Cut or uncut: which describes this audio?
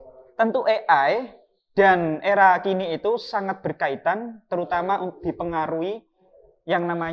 uncut